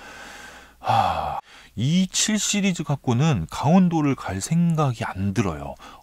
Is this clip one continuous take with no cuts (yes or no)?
no